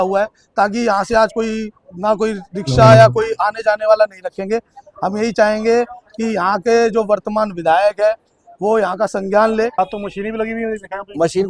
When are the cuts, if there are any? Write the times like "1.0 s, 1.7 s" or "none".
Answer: 9.8 s

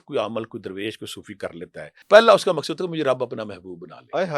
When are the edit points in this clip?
2.0 s

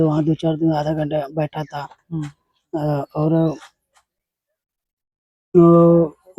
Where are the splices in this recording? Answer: none

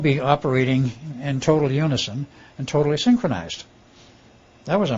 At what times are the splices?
none

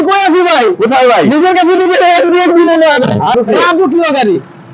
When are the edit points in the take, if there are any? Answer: 3.3 s

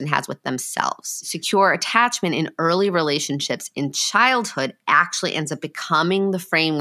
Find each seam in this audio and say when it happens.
1.3 s

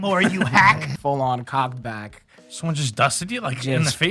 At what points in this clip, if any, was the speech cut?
0.9 s

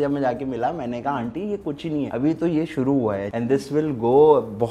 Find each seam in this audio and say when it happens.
2.1 s, 3.3 s

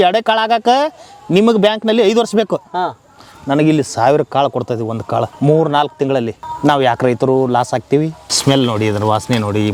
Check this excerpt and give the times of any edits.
5.3 s, 6.4 s, 8.2 s

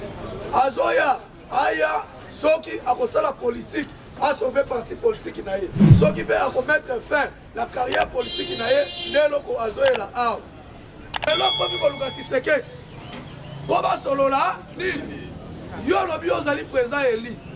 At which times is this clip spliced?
11.3 s

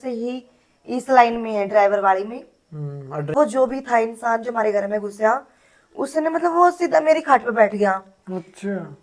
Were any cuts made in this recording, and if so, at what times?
3.3 s

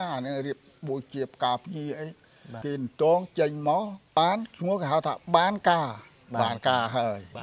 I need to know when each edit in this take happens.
2.6 s, 4.2 s

